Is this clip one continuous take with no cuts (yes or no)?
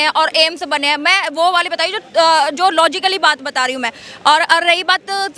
yes